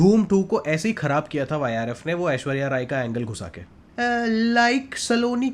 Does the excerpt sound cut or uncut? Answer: cut